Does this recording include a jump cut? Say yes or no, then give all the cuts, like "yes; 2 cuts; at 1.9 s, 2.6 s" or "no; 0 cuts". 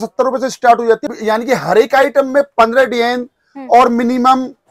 yes; 1 cut; at 1.1 s